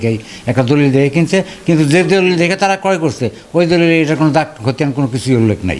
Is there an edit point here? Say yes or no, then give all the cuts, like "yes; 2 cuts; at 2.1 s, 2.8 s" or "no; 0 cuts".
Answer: no; 0 cuts